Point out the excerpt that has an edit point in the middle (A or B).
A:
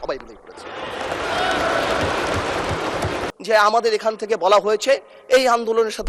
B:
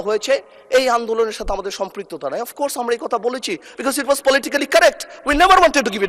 A